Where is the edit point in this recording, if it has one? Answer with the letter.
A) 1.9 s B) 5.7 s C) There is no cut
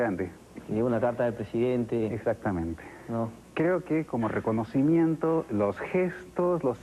A